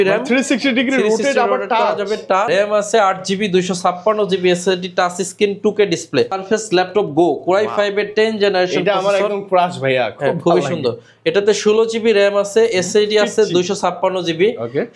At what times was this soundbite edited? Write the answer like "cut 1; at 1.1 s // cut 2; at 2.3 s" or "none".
cut 1; at 2.5 s // cut 2; at 6.4 s

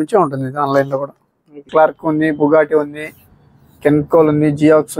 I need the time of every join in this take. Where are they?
cut 1; at 1.6 s

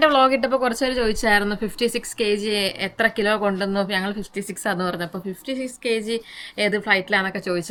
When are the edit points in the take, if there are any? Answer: none

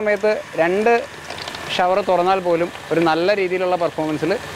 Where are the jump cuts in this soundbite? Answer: none

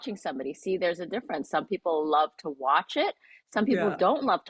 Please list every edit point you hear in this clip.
none

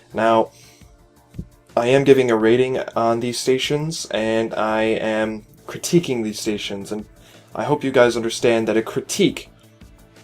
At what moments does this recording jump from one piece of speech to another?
cut 1; at 8.7 s

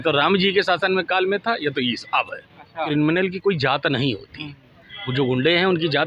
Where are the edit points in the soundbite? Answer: cut 1; at 2.8 s

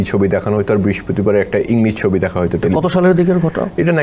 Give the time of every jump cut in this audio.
none

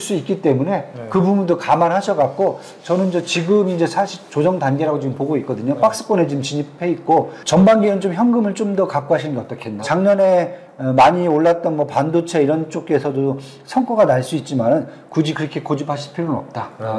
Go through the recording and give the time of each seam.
cut 1; at 7.4 s // cut 2; at 9.8 s

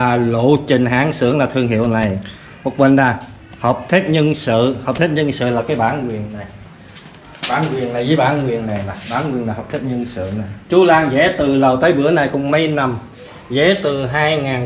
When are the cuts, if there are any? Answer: none

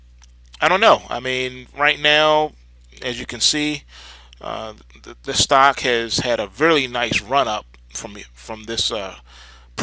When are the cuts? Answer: cut 1; at 4.4 s

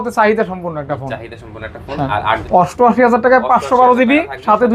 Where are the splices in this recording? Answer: cut 1; at 2.4 s

